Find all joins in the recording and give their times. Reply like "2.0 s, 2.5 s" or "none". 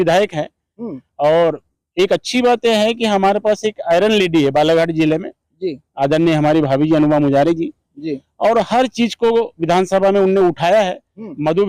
none